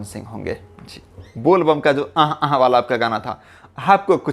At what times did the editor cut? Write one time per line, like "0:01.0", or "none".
0:01.3